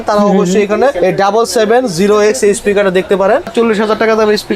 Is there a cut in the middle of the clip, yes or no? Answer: yes